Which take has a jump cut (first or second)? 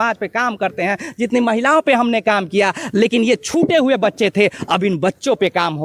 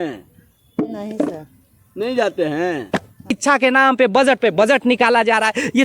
second